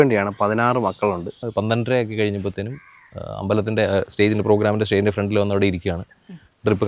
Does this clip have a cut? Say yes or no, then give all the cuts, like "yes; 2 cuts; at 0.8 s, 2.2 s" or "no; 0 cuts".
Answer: yes; 1 cut; at 1.4 s